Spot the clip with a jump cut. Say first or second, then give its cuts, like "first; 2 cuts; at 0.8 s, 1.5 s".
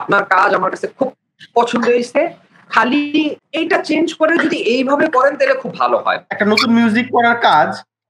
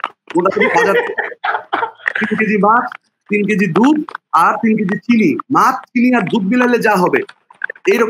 first; 2 cuts; at 3.5 s, 6.2 s